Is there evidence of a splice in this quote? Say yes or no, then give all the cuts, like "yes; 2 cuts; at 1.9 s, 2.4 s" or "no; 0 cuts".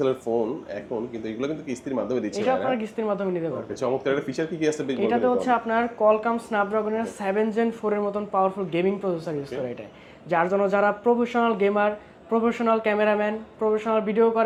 no; 0 cuts